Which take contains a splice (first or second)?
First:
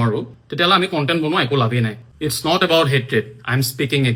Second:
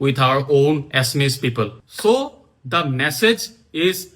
second